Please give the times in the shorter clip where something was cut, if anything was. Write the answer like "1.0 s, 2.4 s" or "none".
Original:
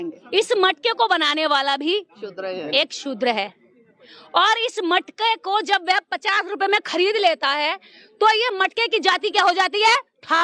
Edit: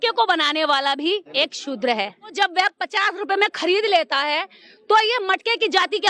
1.3 s, 2.3 s